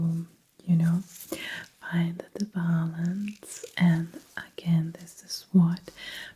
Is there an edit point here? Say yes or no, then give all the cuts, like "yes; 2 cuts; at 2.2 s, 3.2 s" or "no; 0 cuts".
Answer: no; 0 cuts